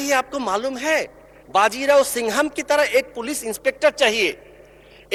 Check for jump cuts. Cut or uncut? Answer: uncut